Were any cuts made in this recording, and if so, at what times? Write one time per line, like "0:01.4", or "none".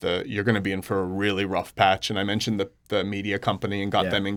none